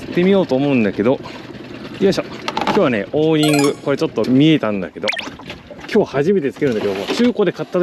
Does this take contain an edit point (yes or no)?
yes